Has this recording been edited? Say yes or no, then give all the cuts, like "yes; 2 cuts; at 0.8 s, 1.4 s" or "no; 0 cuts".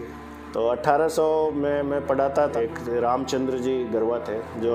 yes; 1 cut; at 2.5 s